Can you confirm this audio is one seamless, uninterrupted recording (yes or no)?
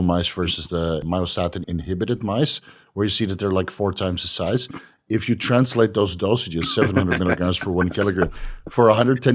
no